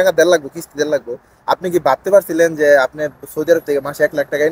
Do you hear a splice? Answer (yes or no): no